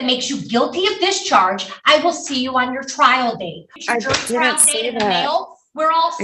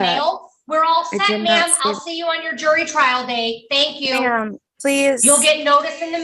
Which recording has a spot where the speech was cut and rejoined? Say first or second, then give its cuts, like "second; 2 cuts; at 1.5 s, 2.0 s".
first; 1 cut; at 3.7 s